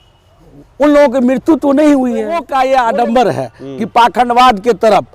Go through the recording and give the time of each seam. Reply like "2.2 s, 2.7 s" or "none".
2.4 s